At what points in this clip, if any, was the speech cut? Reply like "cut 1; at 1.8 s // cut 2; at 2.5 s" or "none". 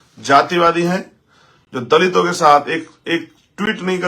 none